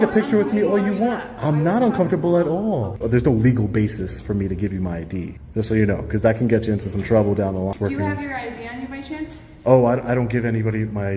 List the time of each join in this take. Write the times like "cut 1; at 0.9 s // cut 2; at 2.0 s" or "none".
cut 1; at 2.9 s // cut 2; at 5.4 s // cut 3; at 7.7 s